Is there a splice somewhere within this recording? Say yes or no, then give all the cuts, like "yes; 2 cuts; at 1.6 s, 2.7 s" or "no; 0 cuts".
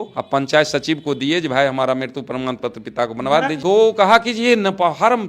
yes; 1 cut; at 3.6 s